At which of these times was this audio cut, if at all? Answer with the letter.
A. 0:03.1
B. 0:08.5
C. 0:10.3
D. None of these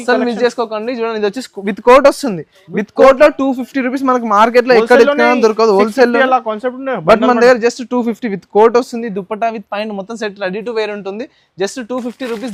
D